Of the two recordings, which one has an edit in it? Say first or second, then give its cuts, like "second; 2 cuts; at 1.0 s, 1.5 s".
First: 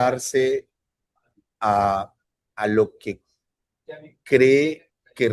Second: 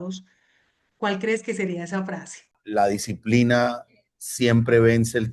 second; 1 cut; at 2.6 s